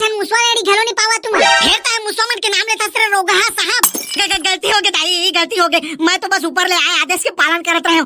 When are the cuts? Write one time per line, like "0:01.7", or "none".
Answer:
0:01.4